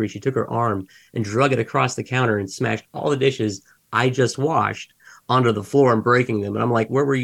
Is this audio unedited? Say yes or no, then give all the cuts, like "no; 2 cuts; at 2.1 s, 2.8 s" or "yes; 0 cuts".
yes; 0 cuts